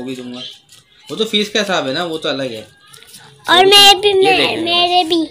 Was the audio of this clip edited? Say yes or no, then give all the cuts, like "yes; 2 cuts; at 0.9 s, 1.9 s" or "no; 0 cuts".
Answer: no; 0 cuts